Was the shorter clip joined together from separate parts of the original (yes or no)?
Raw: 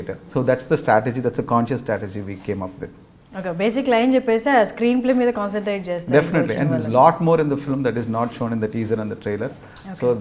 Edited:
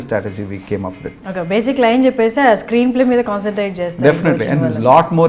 yes